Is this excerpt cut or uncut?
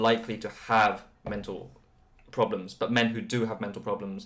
uncut